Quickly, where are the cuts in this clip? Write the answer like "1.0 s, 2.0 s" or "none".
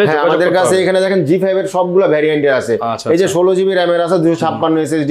none